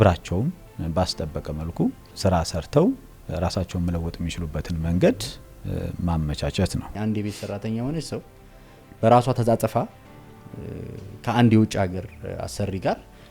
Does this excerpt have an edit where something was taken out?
yes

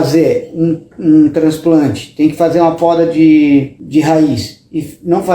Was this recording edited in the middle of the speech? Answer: yes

